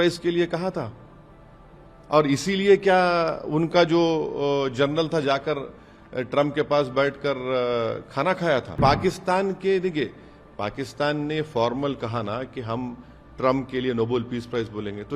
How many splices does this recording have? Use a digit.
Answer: 1